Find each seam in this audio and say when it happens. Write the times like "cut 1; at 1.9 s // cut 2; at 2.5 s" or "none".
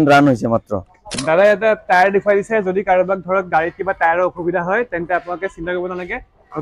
cut 1; at 1.2 s